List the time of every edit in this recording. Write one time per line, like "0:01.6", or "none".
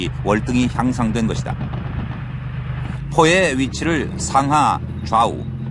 0:01.2